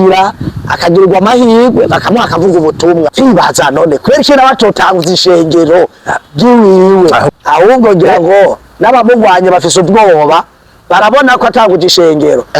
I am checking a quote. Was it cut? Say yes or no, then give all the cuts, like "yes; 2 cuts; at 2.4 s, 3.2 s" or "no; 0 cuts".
yes; 2 cuts; at 3.1 s, 7.3 s